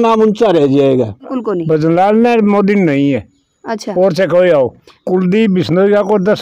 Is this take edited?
yes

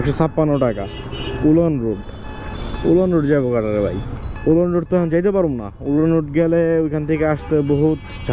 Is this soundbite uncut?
yes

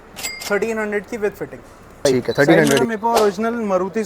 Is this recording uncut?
no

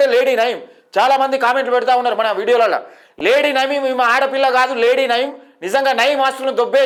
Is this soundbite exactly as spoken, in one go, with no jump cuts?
yes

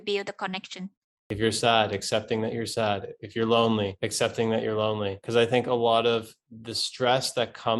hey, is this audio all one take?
no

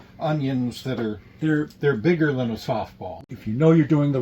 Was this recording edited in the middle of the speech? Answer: yes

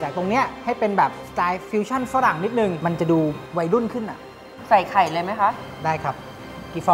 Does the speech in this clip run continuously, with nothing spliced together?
no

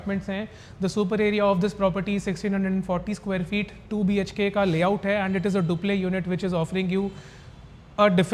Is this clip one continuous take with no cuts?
yes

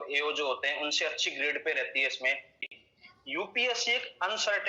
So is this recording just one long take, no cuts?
no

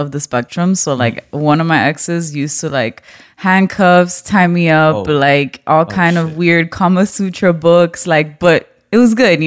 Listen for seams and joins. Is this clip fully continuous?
yes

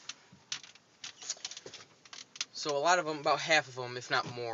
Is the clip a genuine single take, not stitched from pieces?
yes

